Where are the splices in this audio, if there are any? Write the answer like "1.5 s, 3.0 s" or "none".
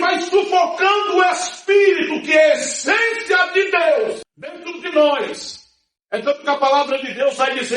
4.8 s